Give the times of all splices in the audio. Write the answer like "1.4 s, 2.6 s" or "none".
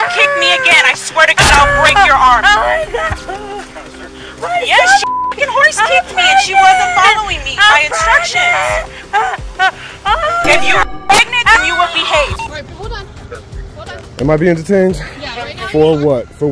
3.2 s, 12.3 s